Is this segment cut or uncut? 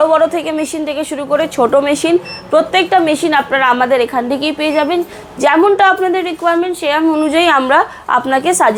uncut